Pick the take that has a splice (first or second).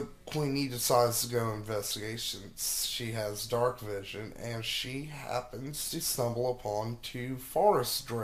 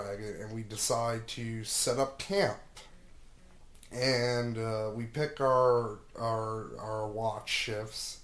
second